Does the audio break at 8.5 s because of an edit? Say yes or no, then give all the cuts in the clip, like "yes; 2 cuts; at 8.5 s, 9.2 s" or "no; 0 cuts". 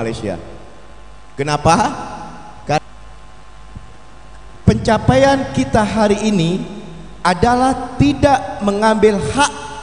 no; 1 cut; at 2.8 s